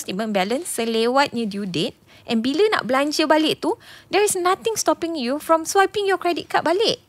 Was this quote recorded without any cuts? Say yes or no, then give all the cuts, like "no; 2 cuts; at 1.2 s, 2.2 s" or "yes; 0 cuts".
yes; 0 cuts